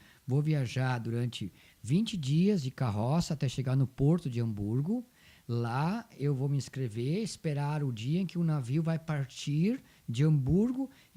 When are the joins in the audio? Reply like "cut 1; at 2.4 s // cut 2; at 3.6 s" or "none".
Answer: none

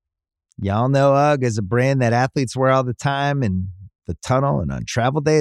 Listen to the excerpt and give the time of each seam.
none

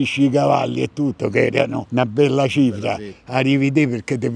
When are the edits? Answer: none

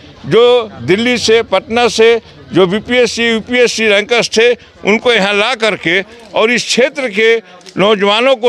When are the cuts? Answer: none

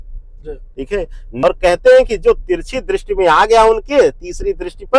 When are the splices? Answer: cut 1; at 1.2 s

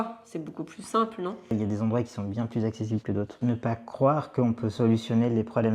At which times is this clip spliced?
cut 1; at 1.4 s // cut 2; at 3.4 s

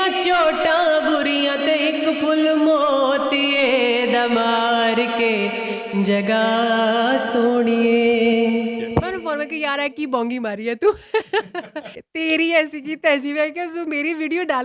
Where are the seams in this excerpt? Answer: cut 1; at 8.9 s // cut 2; at 12.0 s

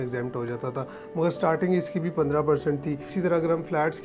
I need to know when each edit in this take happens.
cut 1; at 3.1 s

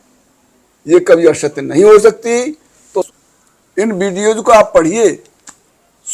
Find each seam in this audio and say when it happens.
cut 1; at 3.0 s

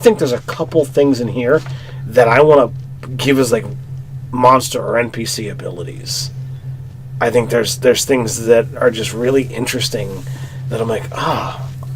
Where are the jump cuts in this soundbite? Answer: cut 1; at 1.6 s

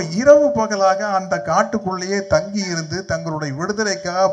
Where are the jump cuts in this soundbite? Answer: none

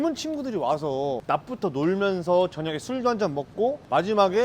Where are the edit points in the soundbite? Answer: cut 1; at 1.2 s

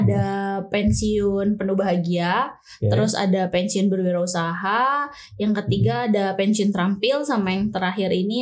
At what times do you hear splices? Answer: none

